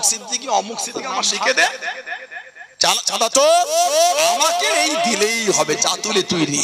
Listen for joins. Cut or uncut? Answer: cut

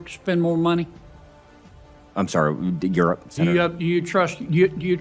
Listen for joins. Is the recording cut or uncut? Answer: uncut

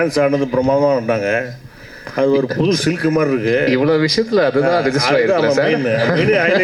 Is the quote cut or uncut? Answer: uncut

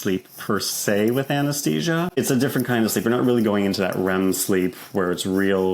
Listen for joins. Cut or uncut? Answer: uncut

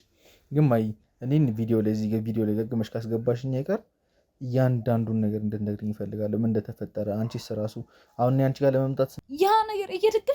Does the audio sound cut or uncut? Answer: cut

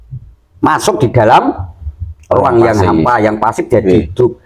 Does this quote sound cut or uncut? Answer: uncut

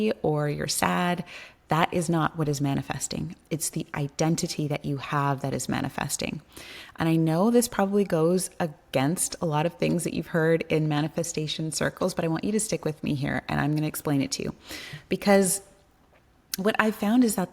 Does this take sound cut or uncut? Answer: uncut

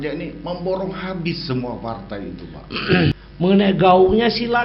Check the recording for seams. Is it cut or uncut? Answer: cut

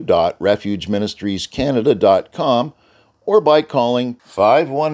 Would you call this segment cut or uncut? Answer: uncut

